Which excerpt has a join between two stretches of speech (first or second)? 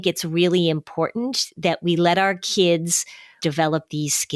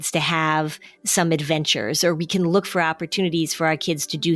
first